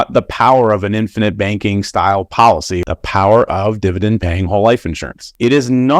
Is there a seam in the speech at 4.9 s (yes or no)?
no